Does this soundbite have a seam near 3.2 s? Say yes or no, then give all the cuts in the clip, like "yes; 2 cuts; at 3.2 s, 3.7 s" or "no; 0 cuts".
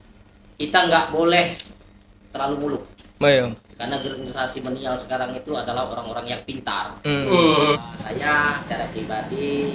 no; 1 cut; at 7.8 s